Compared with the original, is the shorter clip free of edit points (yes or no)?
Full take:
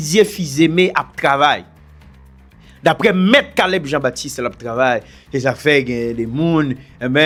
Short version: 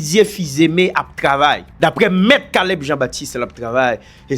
no